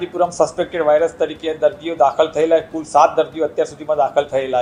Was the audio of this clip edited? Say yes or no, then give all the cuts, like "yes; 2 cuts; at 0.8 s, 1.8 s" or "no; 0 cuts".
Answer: no; 0 cuts